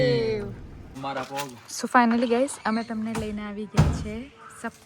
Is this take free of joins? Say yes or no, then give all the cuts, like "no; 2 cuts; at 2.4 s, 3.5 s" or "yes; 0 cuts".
no; 1 cut; at 1.0 s